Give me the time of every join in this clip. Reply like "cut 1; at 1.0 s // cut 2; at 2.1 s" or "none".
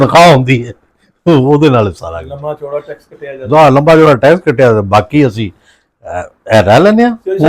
none